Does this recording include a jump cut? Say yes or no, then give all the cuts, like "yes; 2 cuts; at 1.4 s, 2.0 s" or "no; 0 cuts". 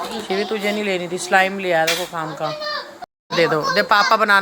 yes; 1 cut; at 2.9 s